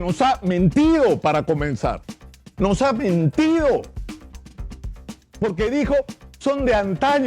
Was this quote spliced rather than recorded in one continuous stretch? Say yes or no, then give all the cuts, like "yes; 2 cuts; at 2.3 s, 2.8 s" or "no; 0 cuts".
yes; 2 cuts; at 3.9 s, 5.4 s